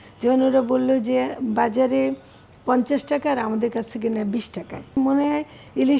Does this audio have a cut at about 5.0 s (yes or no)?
yes